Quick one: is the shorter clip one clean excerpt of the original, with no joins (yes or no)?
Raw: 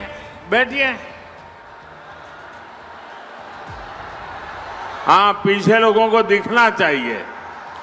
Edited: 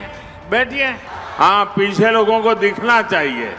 no